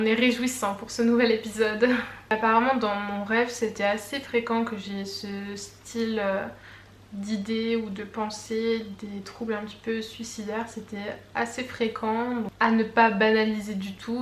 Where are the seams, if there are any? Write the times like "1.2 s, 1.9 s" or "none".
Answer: none